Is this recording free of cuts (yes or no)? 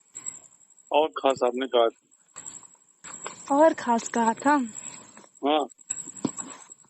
no